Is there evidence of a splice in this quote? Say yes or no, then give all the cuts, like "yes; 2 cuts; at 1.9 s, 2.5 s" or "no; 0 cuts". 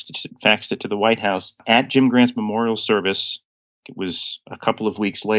yes; 1 cut; at 1.6 s